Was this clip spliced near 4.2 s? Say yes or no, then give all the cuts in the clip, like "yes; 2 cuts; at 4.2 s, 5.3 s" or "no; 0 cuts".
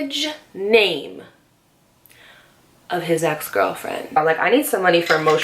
yes; 1 cut; at 4.2 s